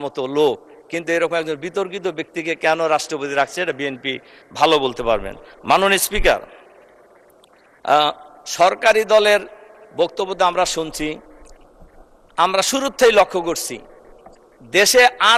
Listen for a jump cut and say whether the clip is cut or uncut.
uncut